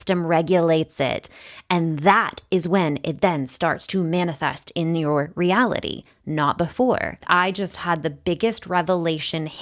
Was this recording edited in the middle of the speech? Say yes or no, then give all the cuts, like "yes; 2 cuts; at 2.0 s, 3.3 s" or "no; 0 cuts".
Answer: yes; 1 cut; at 7.2 s